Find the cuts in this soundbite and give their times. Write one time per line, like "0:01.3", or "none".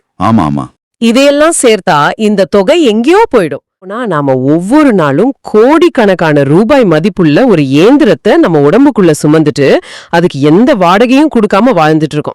0:04.0